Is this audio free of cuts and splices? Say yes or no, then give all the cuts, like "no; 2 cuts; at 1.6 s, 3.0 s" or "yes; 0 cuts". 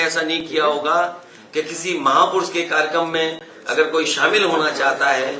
yes; 0 cuts